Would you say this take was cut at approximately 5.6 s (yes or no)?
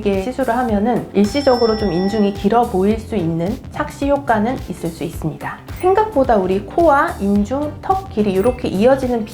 yes